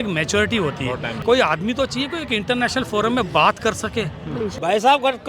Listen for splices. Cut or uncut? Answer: cut